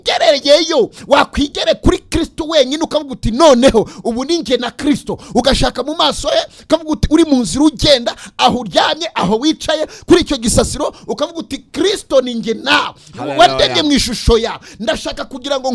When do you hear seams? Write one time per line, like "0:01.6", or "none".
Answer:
none